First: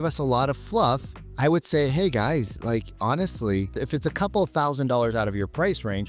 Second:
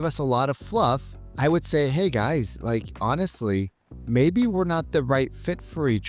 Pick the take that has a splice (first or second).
first